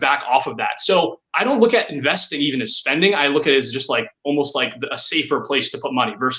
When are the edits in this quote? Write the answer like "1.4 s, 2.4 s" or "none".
none